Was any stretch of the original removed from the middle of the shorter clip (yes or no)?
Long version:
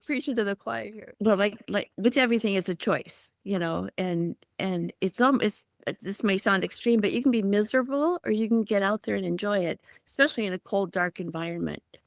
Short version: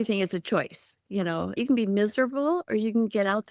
yes